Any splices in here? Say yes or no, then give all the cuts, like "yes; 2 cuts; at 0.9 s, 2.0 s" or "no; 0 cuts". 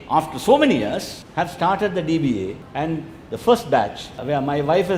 yes; 2 cuts; at 1.2 s, 2.6 s